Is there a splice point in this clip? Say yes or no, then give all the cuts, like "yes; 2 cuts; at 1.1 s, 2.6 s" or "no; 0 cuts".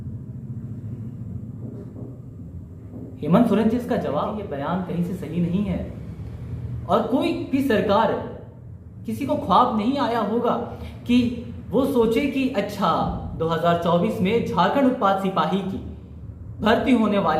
yes; 1 cut; at 4.4 s